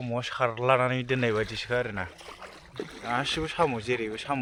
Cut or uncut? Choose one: uncut